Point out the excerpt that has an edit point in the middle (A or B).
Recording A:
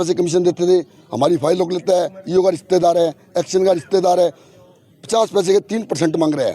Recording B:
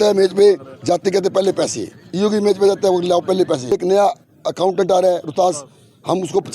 B